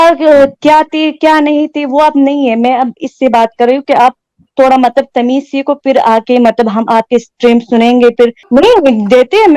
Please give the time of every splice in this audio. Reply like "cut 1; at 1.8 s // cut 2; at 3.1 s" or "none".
cut 1; at 8.4 s

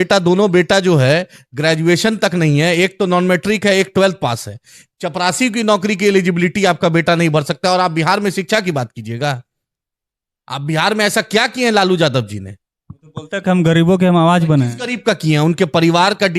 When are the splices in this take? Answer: none

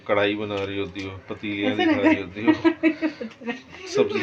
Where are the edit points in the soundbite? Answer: none

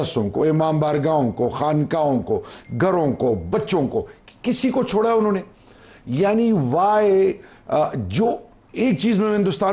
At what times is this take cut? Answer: none

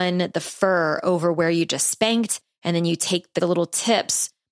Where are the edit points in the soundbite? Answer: cut 1; at 3.3 s

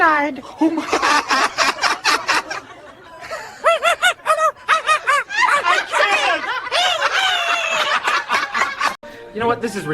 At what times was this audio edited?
cut 1; at 9.0 s

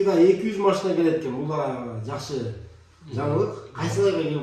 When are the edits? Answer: none

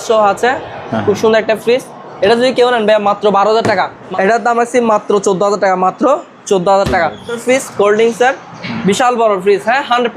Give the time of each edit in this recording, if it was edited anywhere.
cut 1; at 4.0 s // cut 2; at 7.4 s

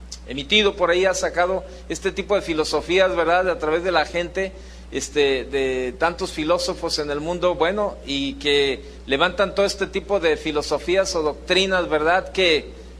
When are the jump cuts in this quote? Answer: none

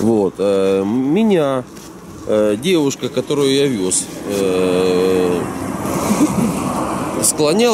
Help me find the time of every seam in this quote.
none

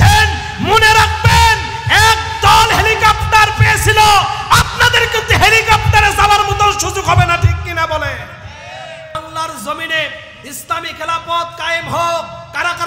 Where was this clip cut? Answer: cut 1; at 9.1 s

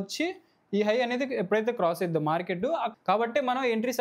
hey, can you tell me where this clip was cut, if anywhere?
cut 1; at 2.9 s

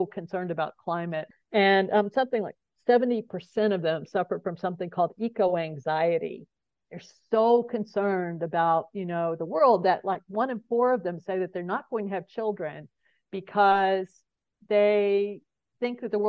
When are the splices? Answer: cut 1; at 1.3 s

